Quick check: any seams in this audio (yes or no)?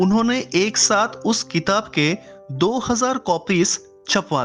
no